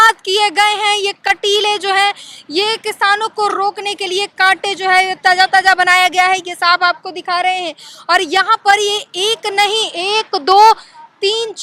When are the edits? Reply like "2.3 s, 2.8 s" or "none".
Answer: none